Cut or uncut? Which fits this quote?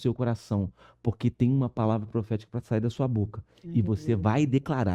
uncut